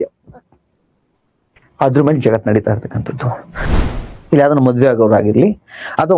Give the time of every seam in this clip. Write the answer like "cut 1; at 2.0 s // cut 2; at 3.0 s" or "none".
cut 1; at 3.7 s